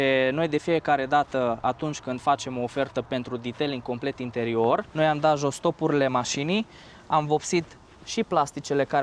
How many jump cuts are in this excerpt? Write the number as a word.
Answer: one